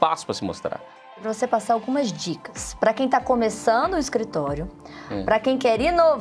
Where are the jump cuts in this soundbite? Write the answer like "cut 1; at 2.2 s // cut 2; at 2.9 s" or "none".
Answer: cut 1; at 1.2 s